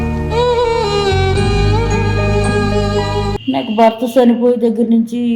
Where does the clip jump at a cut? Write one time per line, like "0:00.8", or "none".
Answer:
0:03.4